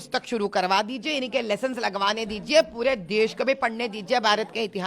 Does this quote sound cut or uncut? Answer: uncut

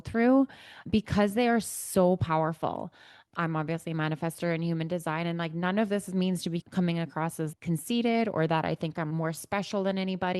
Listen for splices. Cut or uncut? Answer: uncut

